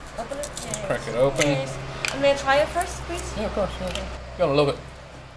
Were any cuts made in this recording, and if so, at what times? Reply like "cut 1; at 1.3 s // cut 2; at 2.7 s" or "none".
cut 1; at 4.2 s